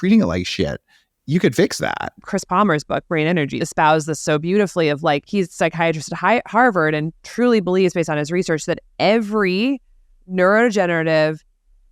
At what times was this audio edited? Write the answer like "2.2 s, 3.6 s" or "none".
2.2 s, 3.6 s, 5.3 s